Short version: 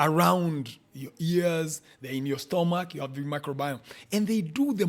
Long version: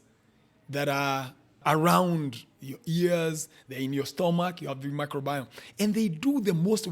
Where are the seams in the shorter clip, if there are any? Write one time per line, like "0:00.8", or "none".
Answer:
none